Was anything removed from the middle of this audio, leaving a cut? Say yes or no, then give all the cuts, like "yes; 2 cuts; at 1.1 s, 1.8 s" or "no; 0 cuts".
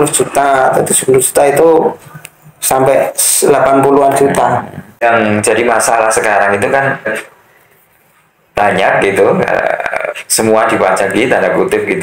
yes; 2 cuts; at 5.0 s, 7.1 s